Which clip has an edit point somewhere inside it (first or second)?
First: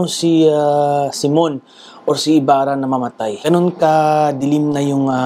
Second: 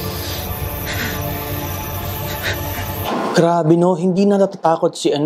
first